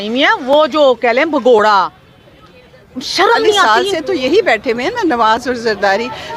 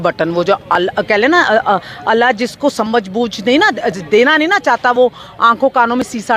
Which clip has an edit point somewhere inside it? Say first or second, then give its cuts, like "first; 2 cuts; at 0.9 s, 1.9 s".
first; 1 cut; at 3.6 s